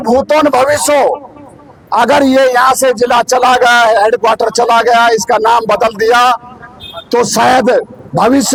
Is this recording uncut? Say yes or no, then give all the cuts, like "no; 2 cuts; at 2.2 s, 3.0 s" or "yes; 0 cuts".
yes; 0 cuts